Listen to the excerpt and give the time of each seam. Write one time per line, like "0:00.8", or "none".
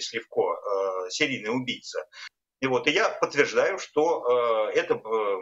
0:02.2